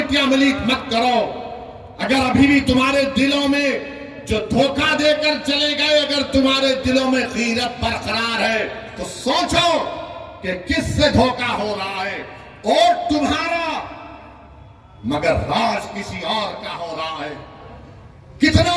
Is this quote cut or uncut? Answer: uncut